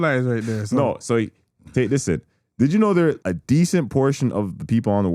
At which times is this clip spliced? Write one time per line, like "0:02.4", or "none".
0:03.2